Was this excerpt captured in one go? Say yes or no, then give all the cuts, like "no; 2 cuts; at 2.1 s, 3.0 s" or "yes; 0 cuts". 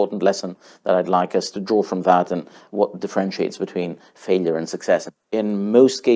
no; 1 cut; at 5.2 s